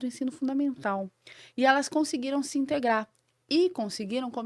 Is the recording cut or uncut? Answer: cut